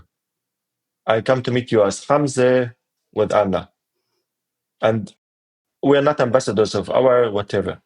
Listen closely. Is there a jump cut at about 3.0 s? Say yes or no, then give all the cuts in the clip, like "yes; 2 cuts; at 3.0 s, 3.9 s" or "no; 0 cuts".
no; 1 cut; at 5.6 s